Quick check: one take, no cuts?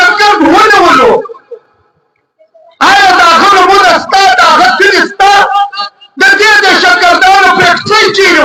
yes; 0 cuts

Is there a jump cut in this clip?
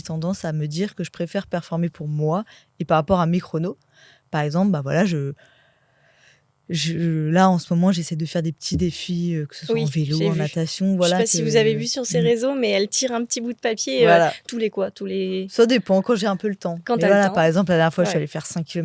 no; 0 cuts

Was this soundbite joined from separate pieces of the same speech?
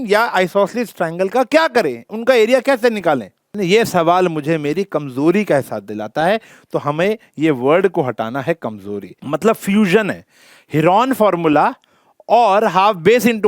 yes; 2 cuts; at 3.5 s, 9.1 s

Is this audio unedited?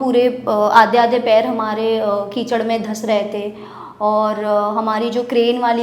yes; 0 cuts

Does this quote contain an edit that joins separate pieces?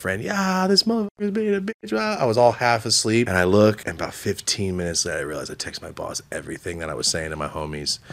yes; 2 cuts; at 3.3 s, 3.9 s

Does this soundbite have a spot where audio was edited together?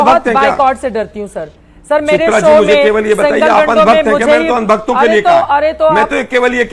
no; 0 cuts

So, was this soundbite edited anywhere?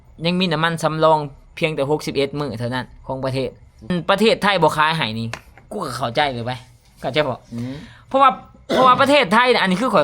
yes; 1 cut; at 3.9 s

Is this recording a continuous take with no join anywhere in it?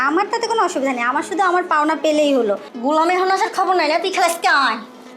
no; 1 cut; at 2.7 s

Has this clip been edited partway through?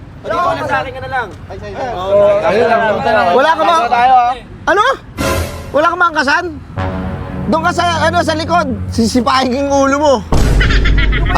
no; 0 cuts

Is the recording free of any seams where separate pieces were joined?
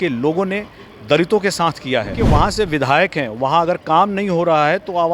no; 1 cut; at 2.2 s

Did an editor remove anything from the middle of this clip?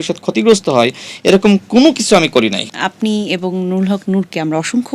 yes; 1 cut; at 2.6 s

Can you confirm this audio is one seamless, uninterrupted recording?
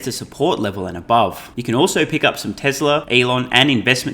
no; 2 cuts; at 1.5 s, 3.1 s

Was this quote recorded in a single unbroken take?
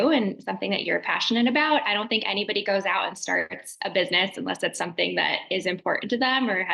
yes; 0 cuts

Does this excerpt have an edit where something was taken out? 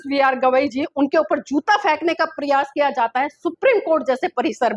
no; 0 cuts

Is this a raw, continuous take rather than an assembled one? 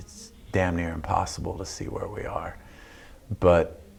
yes; 0 cuts

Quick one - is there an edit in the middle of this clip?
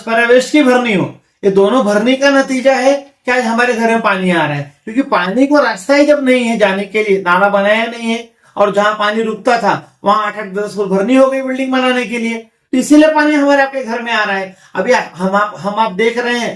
no; 0 cuts

